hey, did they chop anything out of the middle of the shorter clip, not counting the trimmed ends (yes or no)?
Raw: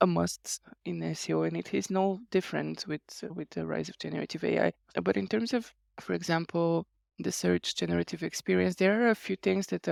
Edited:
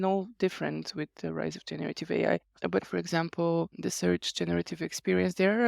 yes